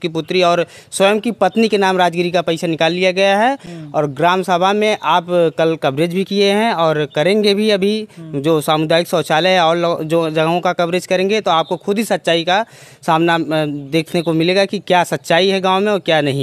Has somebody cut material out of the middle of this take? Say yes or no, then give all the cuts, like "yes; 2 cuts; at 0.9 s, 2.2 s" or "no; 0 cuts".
no; 0 cuts